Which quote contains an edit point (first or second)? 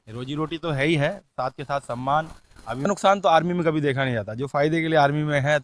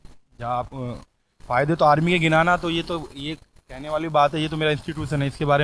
first